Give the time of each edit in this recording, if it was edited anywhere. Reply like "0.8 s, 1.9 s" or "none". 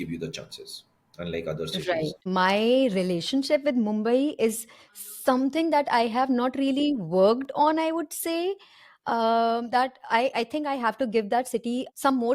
2.1 s